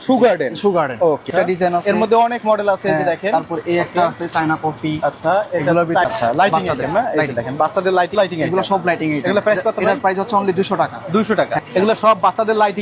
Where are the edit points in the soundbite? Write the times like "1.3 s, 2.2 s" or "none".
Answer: 1.3 s, 6.1 s, 8.1 s, 11.6 s